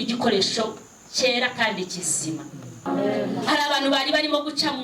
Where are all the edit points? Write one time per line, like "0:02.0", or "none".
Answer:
0:02.8